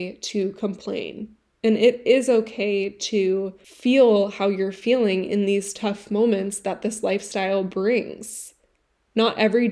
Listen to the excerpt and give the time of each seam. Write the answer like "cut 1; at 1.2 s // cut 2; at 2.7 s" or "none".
cut 1; at 3.6 s